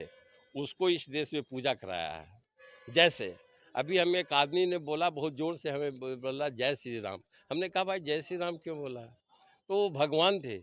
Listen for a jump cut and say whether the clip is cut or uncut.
uncut